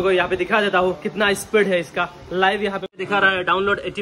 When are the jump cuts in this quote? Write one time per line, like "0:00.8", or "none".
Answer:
0:02.9